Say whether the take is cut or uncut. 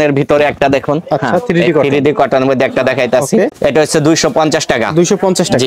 uncut